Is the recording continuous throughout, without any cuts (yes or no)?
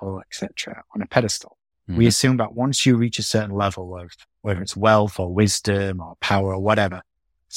yes